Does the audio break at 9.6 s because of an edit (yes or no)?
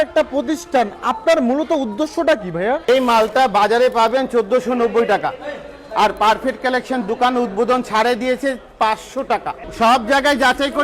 yes